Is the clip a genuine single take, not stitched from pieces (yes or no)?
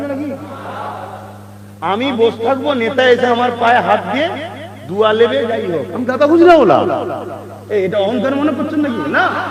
yes